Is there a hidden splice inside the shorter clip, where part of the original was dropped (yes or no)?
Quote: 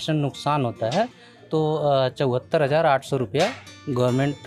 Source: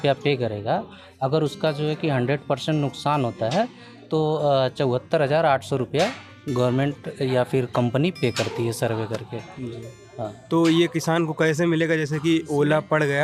no